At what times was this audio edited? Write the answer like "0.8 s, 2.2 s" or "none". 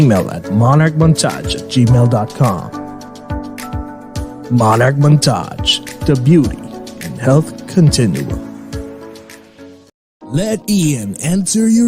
10.5 s